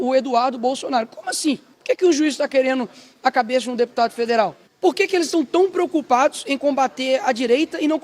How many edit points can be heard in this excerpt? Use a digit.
2